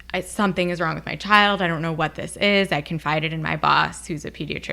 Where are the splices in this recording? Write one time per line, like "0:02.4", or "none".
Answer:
none